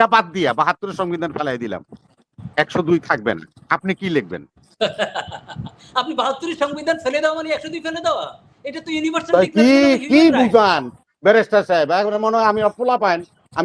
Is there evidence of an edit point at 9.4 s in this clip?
no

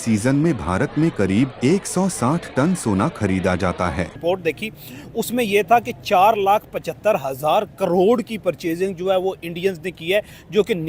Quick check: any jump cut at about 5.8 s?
no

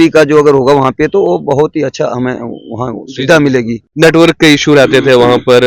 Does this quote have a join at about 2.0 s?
no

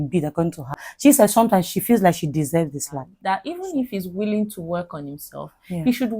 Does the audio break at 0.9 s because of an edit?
yes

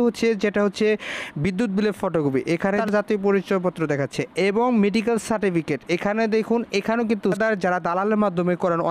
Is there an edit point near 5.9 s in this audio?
no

